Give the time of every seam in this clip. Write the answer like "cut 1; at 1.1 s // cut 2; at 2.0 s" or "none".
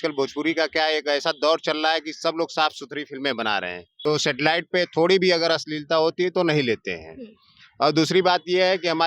cut 1; at 3.8 s